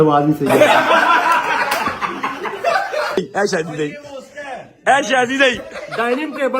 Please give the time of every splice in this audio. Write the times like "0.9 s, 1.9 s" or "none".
3.2 s